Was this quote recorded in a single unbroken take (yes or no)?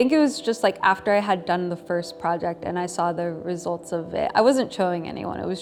yes